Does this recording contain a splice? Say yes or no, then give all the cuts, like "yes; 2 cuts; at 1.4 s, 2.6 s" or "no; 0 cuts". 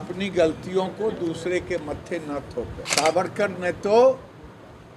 yes; 1 cut; at 2.8 s